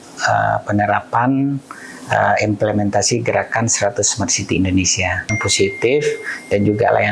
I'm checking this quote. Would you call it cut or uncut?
cut